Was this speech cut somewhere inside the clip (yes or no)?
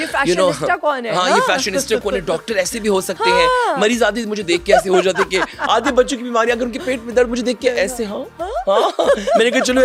no